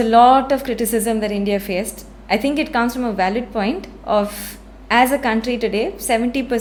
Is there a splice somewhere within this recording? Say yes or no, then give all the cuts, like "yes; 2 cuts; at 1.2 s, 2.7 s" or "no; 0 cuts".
no; 0 cuts